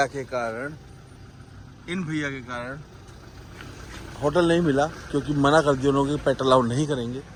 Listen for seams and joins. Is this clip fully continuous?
yes; 0 cuts

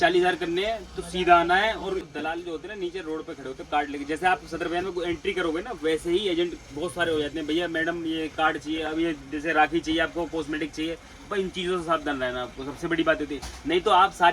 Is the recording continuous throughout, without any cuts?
no; 1 cut; at 2.0 s

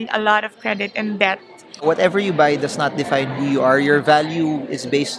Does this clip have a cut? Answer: yes; 1 cut; at 1.8 s

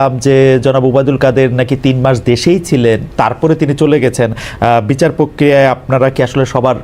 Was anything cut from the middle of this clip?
no; 0 cuts

